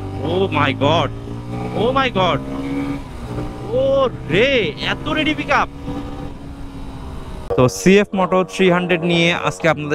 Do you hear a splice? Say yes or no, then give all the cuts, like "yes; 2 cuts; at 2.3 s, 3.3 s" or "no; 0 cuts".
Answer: yes; 1 cut; at 7.4 s